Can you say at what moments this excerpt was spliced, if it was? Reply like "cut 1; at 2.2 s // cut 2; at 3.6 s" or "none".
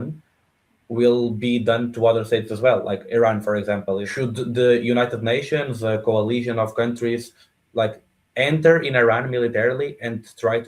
cut 1; at 4.1 s